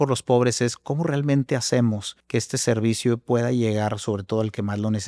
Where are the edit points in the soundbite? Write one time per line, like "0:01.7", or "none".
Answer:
0:02.1